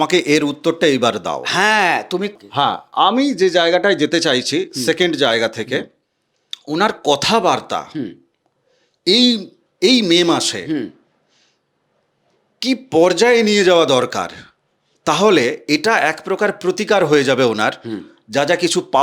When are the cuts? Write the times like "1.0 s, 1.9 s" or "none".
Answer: 2.3 s